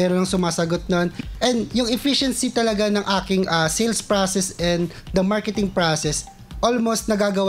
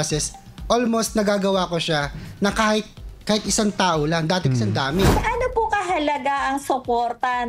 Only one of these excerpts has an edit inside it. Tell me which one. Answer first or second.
second